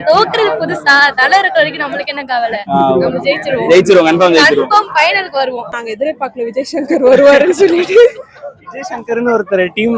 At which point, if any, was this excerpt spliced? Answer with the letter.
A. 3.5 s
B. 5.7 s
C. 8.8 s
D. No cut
B